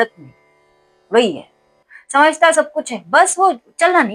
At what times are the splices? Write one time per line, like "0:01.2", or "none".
none